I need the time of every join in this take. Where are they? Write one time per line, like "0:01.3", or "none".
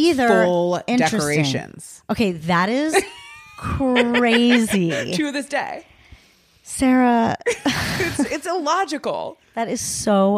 0:09.4